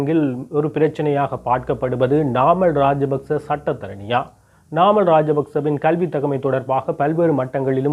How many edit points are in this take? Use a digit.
1